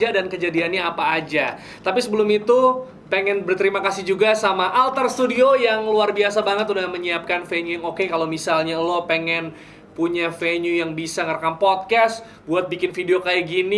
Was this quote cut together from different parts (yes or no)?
no